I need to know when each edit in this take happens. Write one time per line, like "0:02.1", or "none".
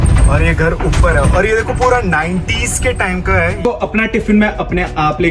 0:03.6